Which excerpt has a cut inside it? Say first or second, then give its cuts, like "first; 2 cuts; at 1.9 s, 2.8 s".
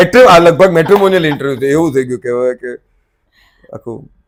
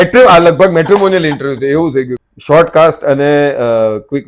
second; 1 cut; at 2.2 s